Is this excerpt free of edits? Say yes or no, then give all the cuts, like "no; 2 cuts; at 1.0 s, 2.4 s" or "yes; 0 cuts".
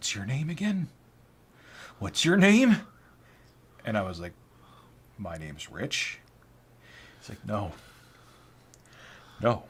yes; 0 cuts